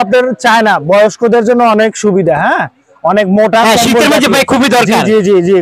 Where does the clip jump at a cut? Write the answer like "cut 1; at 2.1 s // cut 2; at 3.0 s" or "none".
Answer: none